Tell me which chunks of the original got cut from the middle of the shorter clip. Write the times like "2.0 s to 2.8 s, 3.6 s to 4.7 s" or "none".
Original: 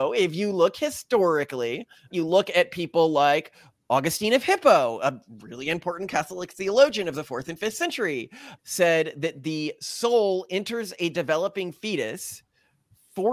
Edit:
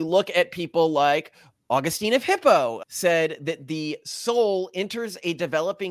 5.0 s to 8.5 s